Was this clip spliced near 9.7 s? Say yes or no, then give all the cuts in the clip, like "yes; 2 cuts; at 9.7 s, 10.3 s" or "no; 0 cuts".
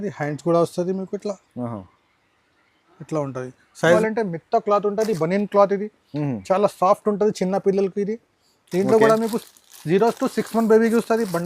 no; 1 cut; at 4.0 s